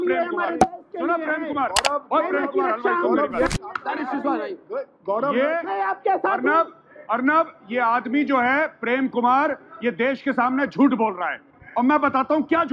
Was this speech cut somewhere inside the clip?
yes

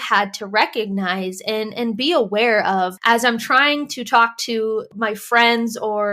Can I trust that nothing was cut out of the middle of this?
no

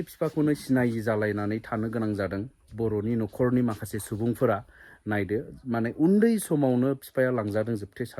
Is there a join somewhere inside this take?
no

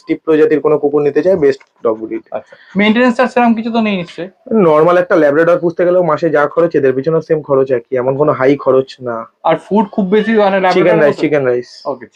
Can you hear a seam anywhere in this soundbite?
no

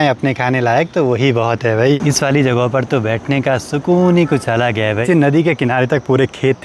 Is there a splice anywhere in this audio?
yes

